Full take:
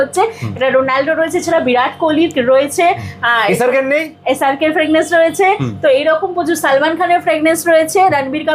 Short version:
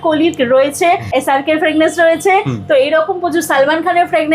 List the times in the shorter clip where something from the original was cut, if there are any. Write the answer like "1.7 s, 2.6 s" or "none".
1.0 s